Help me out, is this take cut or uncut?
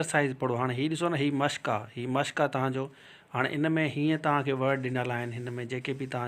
uncut